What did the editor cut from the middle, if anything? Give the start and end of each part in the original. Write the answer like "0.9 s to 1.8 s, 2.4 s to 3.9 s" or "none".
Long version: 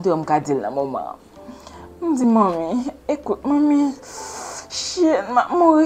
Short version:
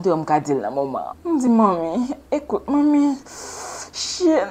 1.1 s to 1.9 s